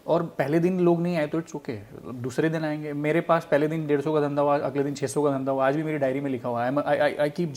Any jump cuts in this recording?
no; 0 cuts

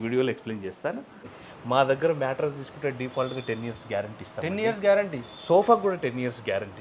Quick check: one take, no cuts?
no; 1 cut; at 1.2 s

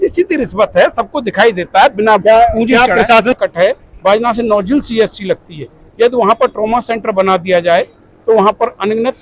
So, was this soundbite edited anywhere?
yes; 1 cut; at 3.3 s

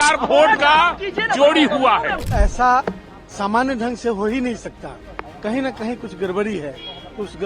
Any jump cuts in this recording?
yes; 1 cut; at 2.2 s

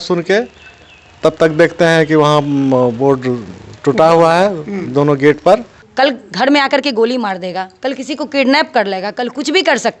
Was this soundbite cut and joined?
yes; 1 cut; at 5.8 s

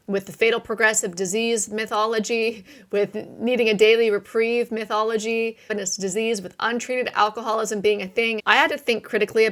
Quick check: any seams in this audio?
yes; 2 cuts; at 5.7 s, 8.4 s

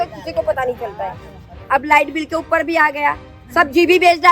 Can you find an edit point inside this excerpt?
yes; 1 cut; at 3.3 s

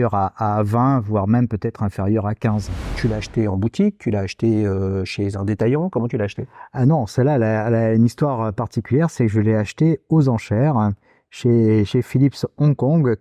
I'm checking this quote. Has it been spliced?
yes; 1 cut; at 3.0 s

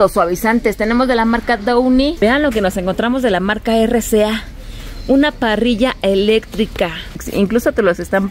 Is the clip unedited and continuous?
no; 2 cuts; at 2.1 s, 7.2 s

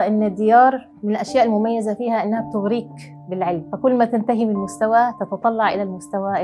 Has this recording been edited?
yes; 2 cuts; at 0.9 s, 3.7 s

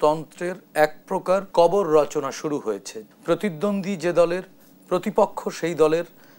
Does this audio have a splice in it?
yes; 2 cuts; at 1.5 s, 3.0 s

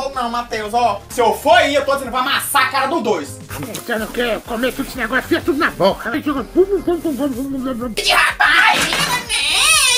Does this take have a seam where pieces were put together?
yes; 3 cuts; at 3.4 s, 6.2 s, 7.9 s

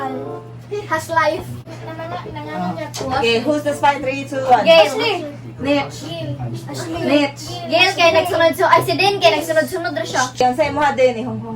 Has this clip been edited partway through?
yes; 1 cut; at 1.6 s

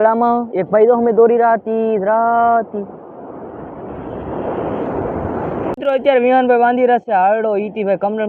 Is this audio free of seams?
no; 1 cut; at 5.8 s

